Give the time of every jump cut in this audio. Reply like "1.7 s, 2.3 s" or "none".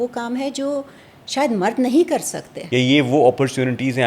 2.5 s